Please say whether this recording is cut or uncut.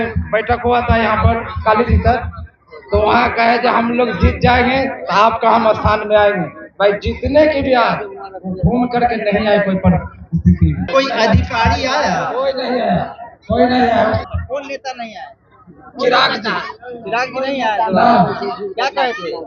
cut